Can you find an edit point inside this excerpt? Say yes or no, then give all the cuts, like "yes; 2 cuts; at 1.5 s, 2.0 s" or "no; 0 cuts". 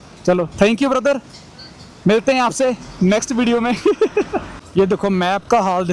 yes; 1 cut; at 4.6 s